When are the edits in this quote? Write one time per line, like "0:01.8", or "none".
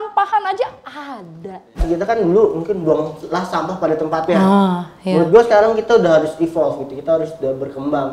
0:01.8

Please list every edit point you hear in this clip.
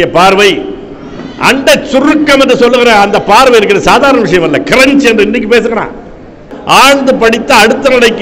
0:06.5

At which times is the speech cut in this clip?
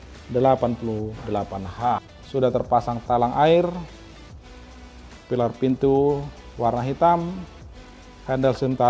0:02.2

